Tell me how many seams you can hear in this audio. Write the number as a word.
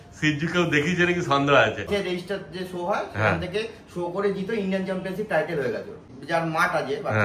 two